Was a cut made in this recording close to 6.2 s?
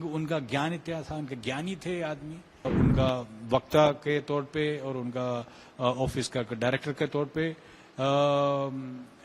no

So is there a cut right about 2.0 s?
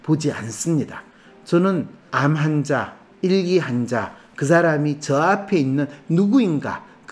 yes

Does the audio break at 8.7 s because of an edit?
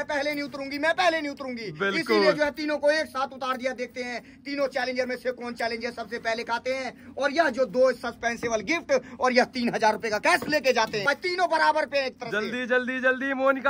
no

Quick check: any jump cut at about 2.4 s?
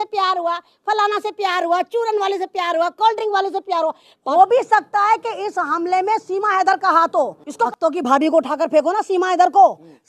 no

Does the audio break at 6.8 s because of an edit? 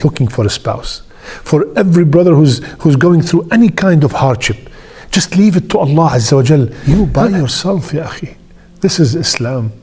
yes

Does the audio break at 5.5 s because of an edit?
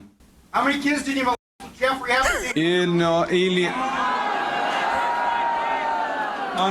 yes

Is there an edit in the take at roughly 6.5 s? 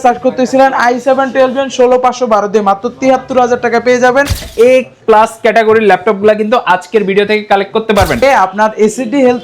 no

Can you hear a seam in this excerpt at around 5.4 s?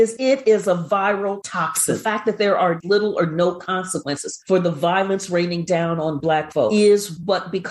no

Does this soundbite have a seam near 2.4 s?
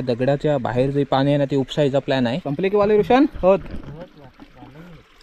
yes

